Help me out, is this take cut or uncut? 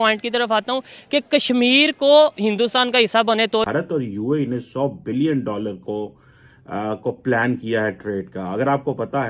cut